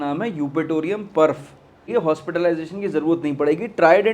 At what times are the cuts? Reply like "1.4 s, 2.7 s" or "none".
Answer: 1.9 s